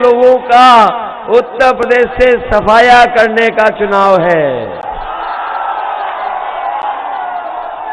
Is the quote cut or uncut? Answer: uncut